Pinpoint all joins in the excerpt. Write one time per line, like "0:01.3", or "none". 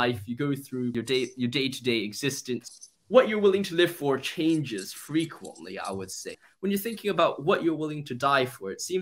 0:00.9
0:02.7
0:06.4